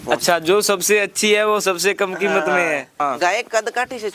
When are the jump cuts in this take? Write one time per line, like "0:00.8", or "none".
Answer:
0:03.0

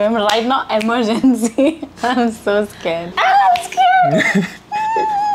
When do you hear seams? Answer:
none

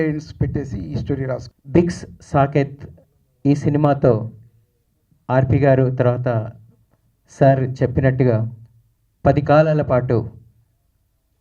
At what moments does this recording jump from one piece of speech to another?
0:01.5

